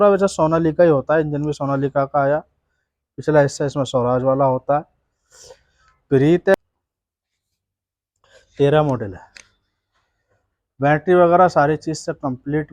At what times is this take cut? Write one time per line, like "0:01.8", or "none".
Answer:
0:06.5

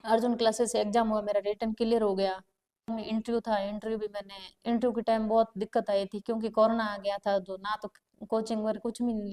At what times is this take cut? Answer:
0:02.9

